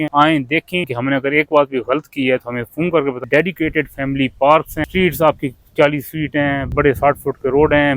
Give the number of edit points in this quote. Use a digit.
3